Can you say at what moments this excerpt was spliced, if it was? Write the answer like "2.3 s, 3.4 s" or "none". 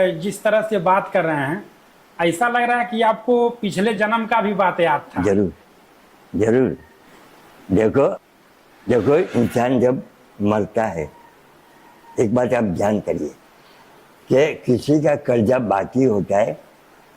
8.2 s